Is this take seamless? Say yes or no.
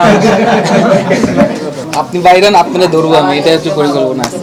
yes